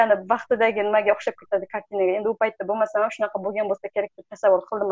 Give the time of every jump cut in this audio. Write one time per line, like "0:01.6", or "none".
none

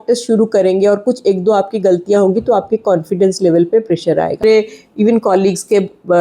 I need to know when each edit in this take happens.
0:04.4

